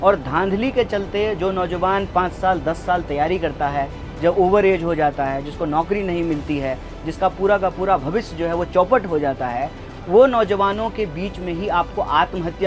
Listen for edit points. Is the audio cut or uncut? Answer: uncut